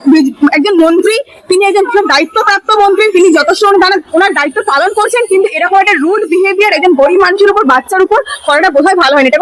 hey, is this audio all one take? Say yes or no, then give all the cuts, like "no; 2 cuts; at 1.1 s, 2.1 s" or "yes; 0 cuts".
yes; 0 cuts